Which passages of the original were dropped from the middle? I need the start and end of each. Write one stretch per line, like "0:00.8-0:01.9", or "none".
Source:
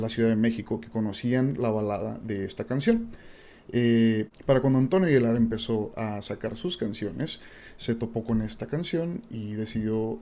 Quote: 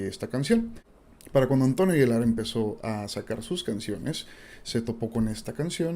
0:03.6-0:04.3